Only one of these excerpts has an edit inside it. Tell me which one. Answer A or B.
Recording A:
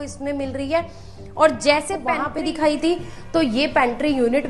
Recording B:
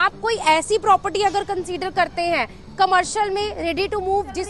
A